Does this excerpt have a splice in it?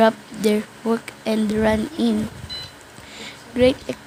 no; 0 cuts

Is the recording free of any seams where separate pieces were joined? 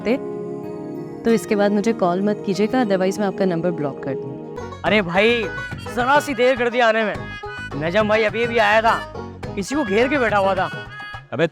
no; 1 cut; at 4.5 s

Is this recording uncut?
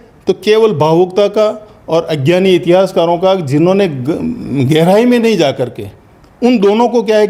yes; 0 cuts

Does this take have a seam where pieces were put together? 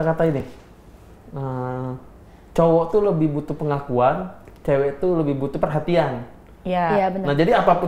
no; 0 cuts

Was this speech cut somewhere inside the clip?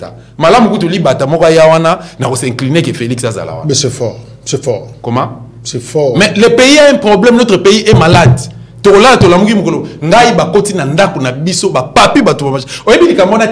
no; 0 cuts

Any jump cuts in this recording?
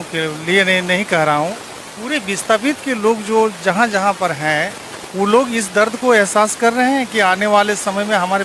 no; 0 cuts

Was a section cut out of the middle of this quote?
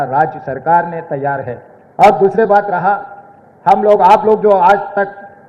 no; 0 cuts

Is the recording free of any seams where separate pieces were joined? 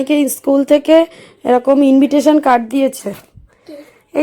no; 1 cut; at 3.0 s

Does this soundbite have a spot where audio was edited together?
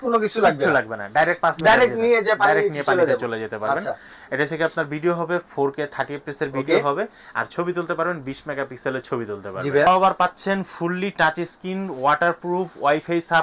yes; 1 cut; at 9.9 s

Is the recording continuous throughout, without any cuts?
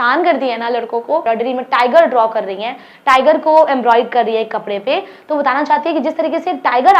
no; 1 cut; at 1.2 s

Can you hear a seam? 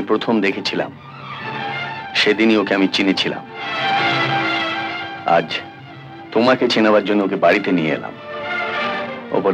no; 0 cuts

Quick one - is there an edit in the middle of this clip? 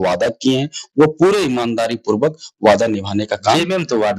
no; 0 cuts

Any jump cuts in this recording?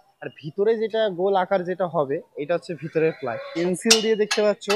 yes; 1 cut; at 3.6 s

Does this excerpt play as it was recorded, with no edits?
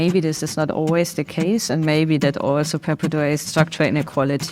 no; 1 cut; at 3.4 s

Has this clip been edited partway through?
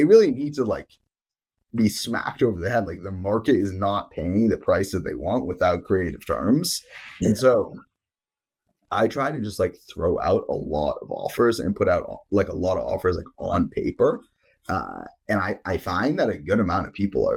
no; 0 cuts

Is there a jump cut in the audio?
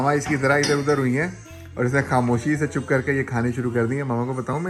no; 0 cuts

